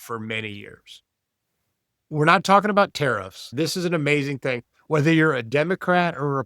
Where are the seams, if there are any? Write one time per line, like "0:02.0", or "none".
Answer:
0:02.0
0:03.5